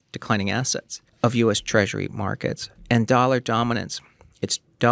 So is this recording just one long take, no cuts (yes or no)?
no